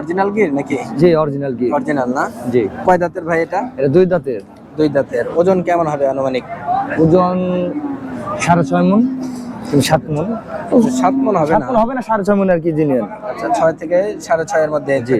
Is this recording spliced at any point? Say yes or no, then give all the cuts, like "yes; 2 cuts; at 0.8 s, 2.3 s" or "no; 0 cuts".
no; 0 cuts